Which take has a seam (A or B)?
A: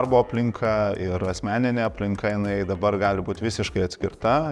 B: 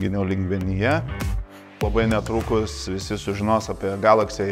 B